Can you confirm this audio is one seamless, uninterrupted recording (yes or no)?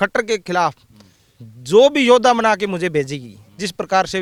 yes